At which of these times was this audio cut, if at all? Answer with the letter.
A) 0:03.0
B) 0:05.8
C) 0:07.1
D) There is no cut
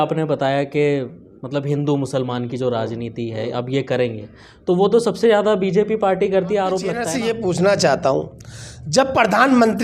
C